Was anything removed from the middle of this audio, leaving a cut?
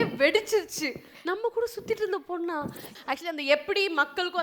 yes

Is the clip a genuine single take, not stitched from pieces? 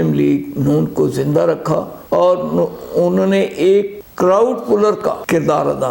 yes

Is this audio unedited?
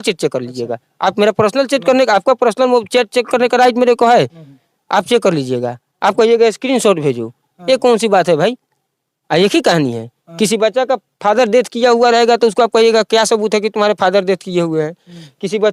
yes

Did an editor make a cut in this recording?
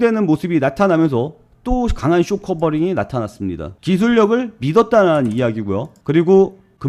no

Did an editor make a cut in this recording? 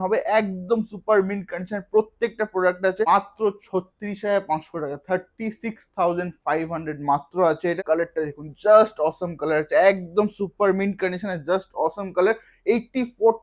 yes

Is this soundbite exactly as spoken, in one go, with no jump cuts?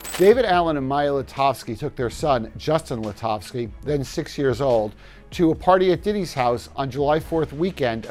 yes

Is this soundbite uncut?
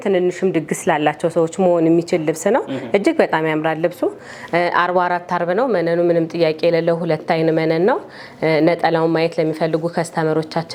yes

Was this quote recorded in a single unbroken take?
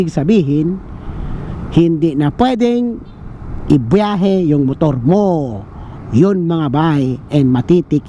yes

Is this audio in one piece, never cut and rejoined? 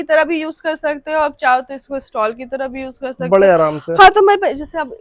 yes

